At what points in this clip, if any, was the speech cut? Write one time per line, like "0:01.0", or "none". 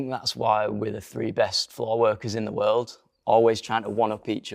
0:03.0